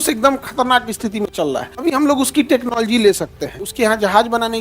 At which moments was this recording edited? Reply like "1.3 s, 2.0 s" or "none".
1.7 s, 3.6 s